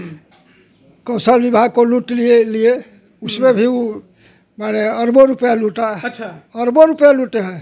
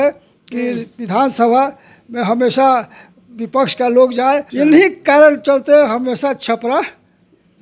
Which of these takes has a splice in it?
second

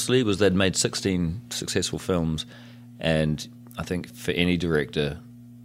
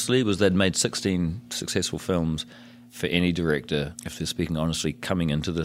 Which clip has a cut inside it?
second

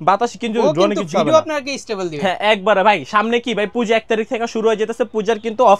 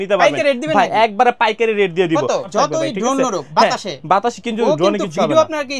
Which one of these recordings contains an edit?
second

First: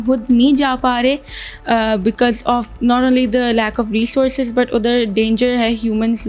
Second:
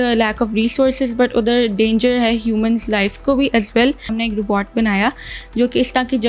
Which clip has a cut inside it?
second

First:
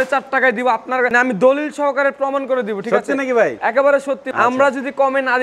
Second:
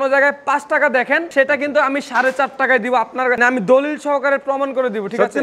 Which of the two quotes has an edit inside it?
first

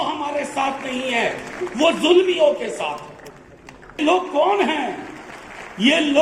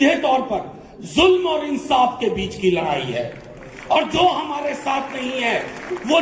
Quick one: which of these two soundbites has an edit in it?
first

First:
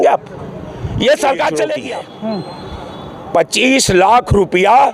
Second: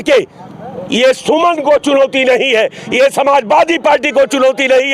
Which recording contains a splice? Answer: first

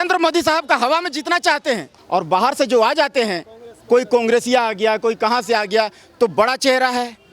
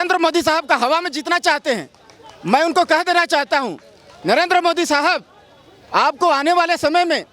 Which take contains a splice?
first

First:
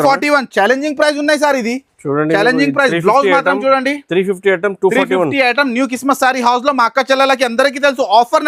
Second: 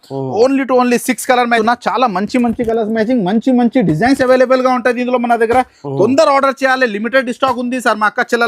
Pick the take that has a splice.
second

